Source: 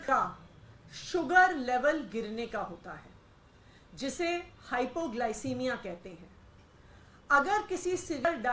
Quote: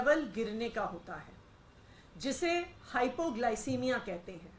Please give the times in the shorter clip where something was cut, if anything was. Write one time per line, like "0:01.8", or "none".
none